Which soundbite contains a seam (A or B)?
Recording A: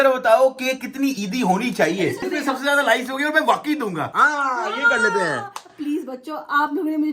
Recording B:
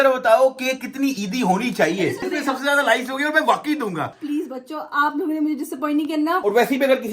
B